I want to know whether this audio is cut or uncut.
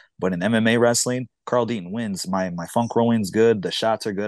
uncut